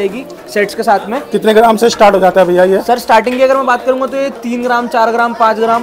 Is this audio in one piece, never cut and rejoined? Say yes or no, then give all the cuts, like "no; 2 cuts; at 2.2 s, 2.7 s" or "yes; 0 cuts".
yes; 0 cuts